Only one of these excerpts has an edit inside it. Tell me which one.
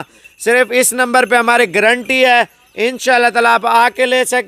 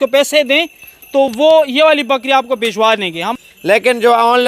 second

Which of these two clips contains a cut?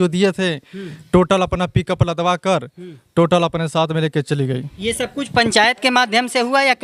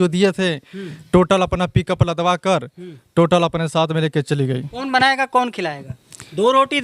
second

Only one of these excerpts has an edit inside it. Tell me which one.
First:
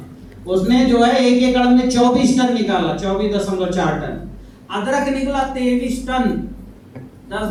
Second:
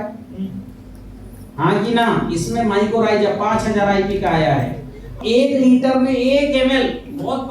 second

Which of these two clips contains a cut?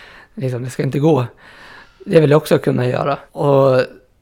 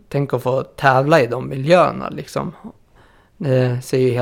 first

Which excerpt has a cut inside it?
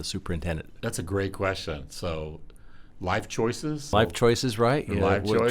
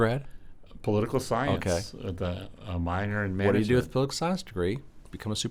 first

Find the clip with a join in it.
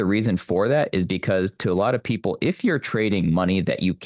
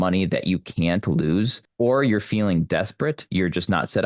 second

